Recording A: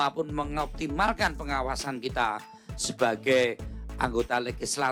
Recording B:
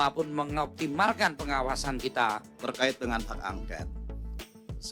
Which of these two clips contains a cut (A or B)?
B